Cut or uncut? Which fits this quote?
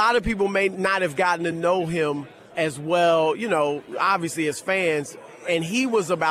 cut